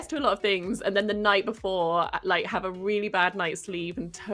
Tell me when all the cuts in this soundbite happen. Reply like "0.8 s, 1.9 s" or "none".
none